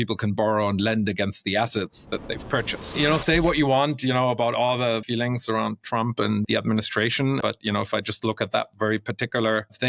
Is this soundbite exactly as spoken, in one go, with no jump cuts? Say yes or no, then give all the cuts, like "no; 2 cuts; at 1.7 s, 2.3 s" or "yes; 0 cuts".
no; 4 cuts; at 2.9 s, 5.0 s, 6.5 s, 7.4 s